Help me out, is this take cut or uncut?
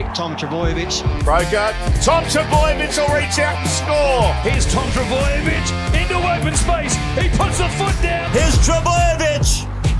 cut